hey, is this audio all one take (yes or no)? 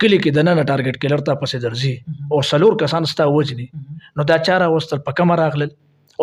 yes